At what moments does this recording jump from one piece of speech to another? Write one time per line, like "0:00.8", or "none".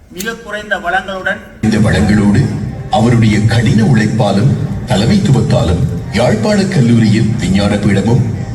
0:01.6